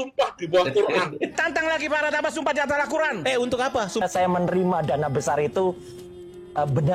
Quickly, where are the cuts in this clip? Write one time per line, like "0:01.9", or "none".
0:01.3
0:04.0